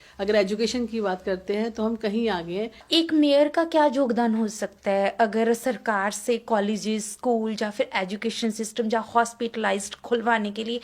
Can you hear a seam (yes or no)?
yes